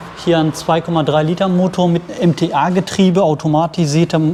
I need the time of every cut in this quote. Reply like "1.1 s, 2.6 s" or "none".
none

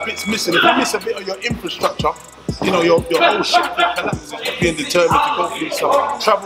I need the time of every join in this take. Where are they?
4.5 s

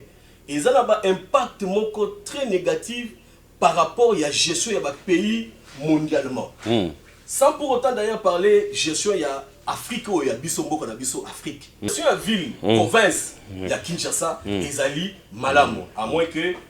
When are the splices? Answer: 11.9 s

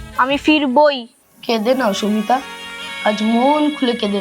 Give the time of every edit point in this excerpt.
1.1 s

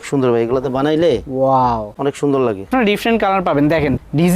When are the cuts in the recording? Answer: 2.7 s

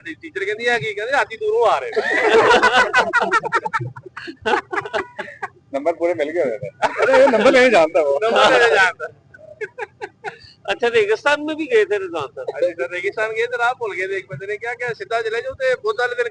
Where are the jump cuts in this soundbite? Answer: none

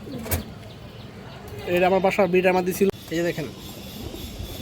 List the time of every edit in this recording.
2.9 s

